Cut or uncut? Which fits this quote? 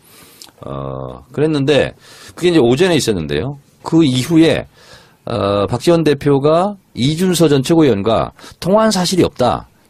uncut